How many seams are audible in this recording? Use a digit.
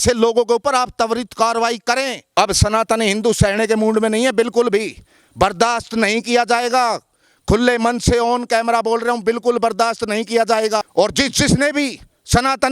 2